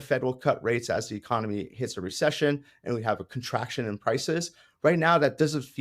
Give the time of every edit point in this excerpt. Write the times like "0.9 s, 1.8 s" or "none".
none